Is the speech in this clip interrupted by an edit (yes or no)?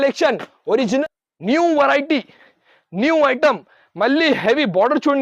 yes